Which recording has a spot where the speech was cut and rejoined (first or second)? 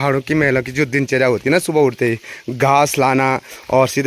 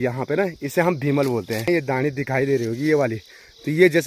second